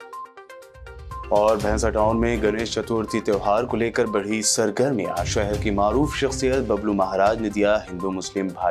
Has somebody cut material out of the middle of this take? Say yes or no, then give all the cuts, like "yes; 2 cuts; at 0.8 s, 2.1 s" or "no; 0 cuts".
yes; 1 cut; at 0.9 s